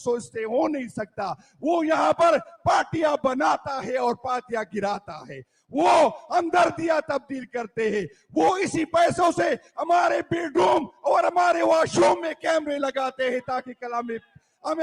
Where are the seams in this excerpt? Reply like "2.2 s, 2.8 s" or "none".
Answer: none